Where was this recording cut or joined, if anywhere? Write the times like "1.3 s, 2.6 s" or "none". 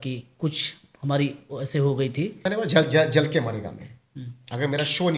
2.4 s